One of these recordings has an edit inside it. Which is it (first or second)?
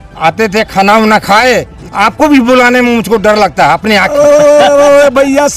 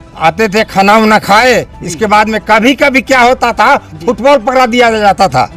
first